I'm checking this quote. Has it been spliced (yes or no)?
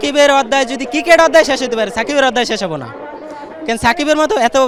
no